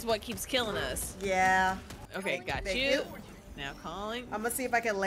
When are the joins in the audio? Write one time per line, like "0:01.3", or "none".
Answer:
0:02.1